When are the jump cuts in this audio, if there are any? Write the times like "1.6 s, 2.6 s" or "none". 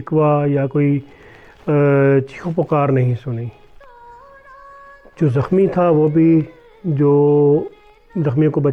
none

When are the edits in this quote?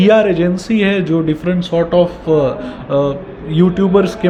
none

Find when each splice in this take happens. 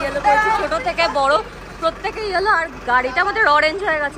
none

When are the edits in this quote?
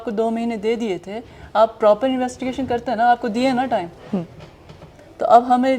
none

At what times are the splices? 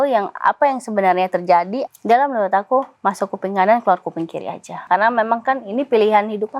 1.8 s, 4.8 s

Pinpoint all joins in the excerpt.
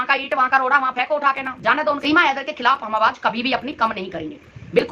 2.0 s

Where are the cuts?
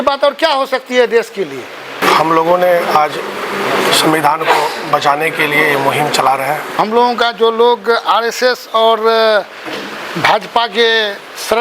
2.0 s, 6.8 s

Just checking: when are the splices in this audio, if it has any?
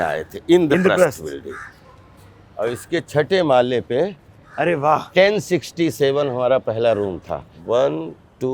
7.5 s

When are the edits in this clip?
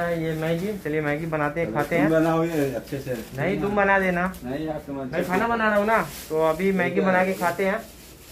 none

